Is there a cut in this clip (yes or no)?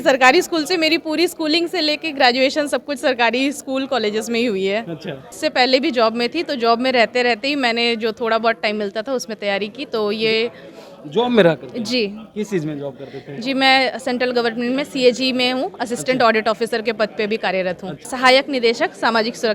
yes